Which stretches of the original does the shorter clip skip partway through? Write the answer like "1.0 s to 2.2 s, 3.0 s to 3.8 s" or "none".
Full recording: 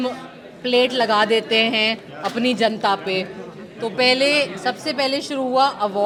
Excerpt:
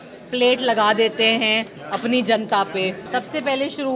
3.3 s to 4.5 s